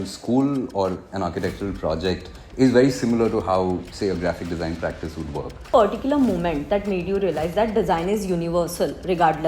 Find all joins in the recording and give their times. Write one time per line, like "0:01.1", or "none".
0:05.7